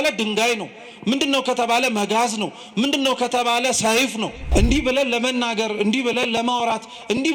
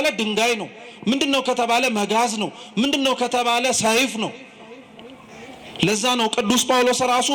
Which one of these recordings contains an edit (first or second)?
first